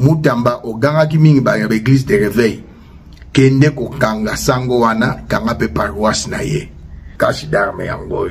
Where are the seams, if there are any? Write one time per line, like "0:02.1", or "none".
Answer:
0:07.0